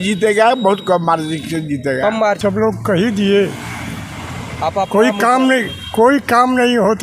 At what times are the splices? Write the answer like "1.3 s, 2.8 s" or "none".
2.4 s

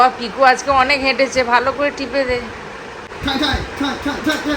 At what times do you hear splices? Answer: 3.0 s

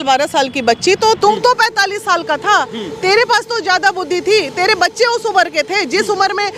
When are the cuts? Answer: 1.2 s

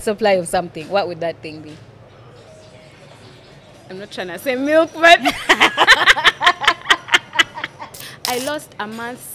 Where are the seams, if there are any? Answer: 2.5 s, 8.0 s

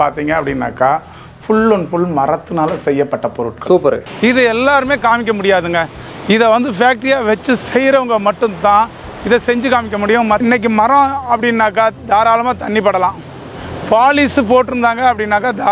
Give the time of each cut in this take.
4.1 s, 10.4 s

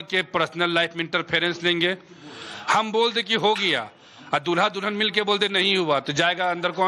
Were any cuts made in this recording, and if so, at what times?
1.7 s

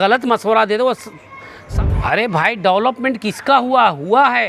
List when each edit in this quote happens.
1.6 s

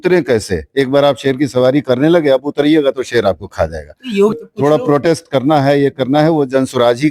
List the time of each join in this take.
4.3 s

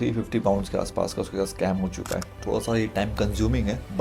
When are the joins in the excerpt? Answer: 2.3 s

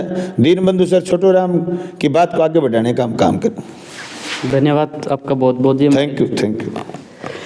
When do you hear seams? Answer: none

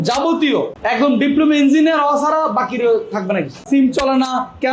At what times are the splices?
3.6 s

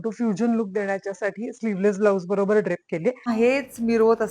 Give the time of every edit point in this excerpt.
3.3 s

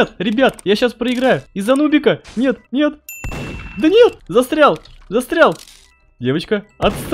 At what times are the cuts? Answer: 1.5 s, 2.6 s, 4.2 s

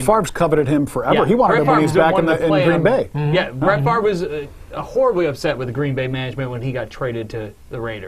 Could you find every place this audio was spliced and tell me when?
none

